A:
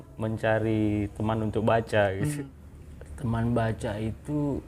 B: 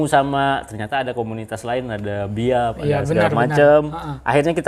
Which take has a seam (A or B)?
A